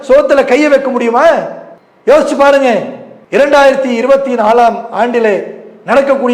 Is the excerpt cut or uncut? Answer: cut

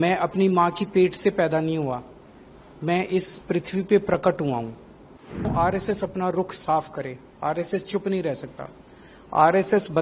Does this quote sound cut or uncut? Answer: cut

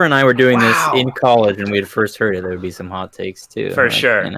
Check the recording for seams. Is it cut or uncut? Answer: uncut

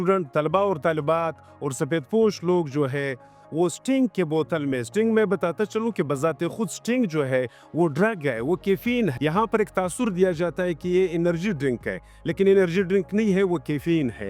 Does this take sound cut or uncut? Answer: uncut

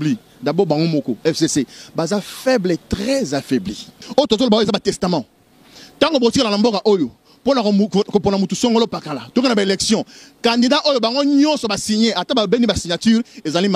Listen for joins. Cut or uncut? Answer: cut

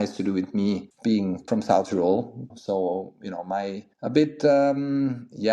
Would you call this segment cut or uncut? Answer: cut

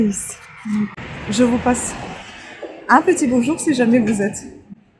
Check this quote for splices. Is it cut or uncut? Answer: uncut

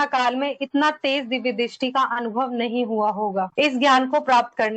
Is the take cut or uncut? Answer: cut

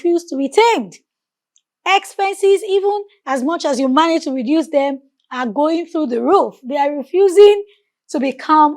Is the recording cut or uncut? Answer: uncut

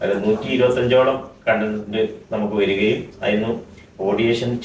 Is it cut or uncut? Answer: uncut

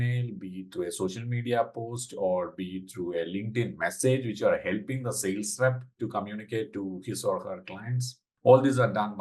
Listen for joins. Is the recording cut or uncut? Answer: uncut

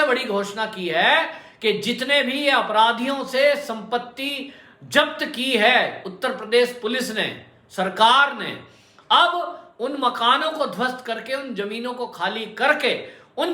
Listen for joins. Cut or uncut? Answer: uncut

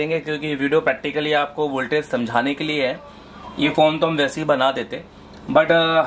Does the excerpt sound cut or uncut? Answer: uncut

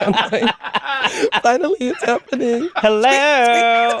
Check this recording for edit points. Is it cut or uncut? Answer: uncut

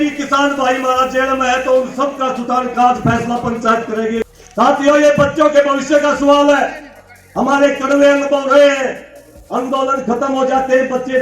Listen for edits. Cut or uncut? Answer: cut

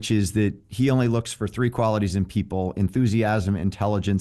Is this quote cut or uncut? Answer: uncut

